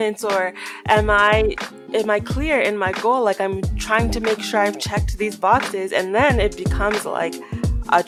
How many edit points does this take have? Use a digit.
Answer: 0